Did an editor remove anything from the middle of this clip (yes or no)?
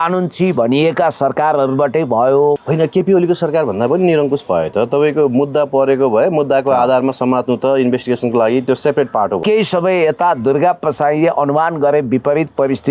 yes